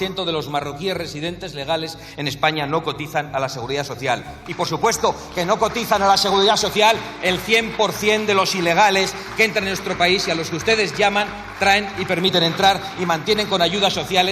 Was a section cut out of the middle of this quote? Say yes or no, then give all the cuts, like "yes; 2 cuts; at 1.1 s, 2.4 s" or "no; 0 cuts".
no; 0 cuts